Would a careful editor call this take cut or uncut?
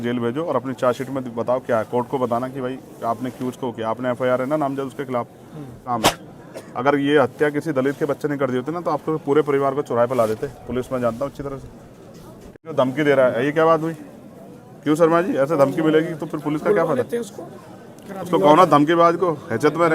cut